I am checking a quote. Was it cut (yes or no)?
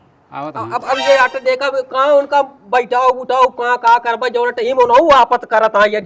no